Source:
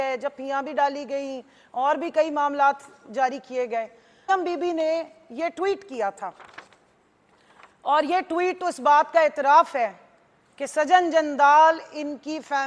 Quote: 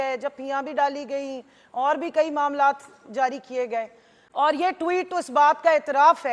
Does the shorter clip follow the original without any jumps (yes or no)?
no